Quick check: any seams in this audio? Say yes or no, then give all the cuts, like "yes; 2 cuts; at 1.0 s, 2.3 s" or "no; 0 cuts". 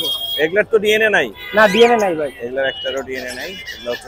no; 0 cuts